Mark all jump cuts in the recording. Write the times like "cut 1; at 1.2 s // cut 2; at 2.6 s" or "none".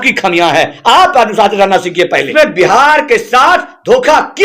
cut 1; at 2.3 s

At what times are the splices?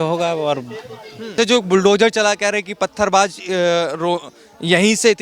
cut 1; at 1.3 s

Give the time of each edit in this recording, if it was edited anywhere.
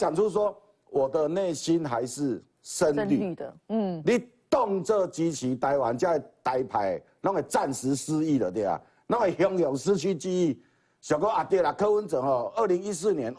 none

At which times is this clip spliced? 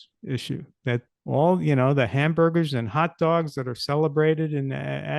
cut 1; at 1.1 s

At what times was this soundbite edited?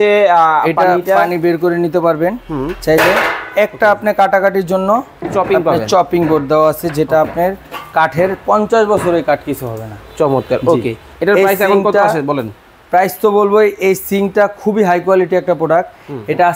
none

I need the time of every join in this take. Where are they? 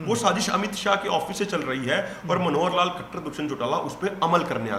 none

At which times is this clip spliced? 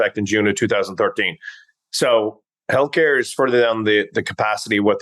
none

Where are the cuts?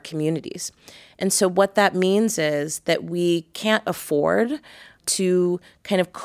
cut 1; at 5.0 s

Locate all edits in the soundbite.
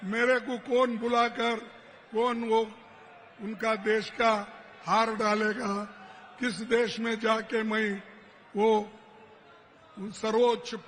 none

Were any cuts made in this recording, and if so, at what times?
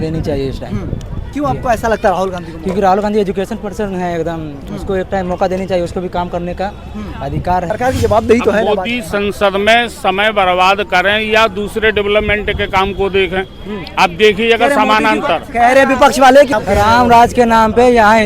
cut 1; at 7.7 s // cut 2; at 16.5 s

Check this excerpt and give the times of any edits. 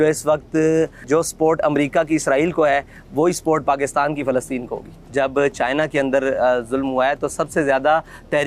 cut 1; at 1.0 s // cut 2; at 5.0 s

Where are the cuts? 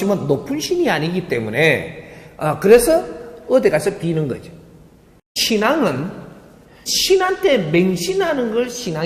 cut 1; at 5.3 s

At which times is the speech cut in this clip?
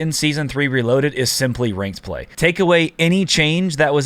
cut 1; at 2.2 s

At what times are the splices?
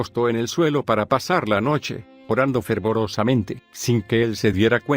cut 1; at 2.8 s

